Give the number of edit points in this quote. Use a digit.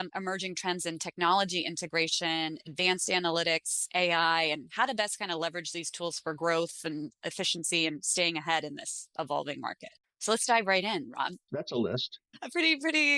2